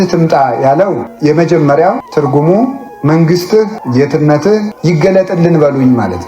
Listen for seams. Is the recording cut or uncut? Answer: cut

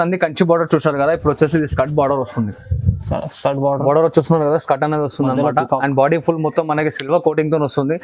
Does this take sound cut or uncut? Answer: uncut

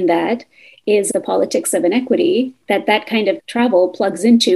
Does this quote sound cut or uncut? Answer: cut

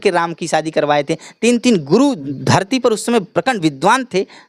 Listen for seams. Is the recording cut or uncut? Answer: cut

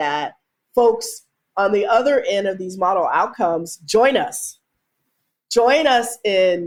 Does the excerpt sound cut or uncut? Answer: uncut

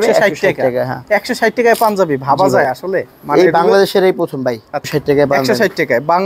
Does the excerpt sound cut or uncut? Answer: cut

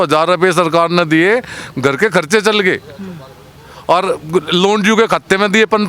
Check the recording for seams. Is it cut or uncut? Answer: uncut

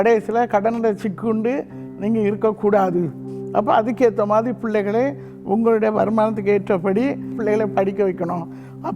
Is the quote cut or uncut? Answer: cut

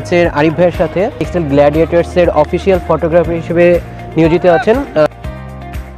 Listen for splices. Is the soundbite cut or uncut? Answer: cut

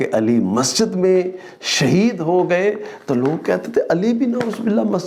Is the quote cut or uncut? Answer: uncut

